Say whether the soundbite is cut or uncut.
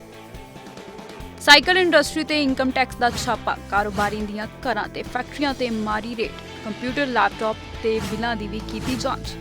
cut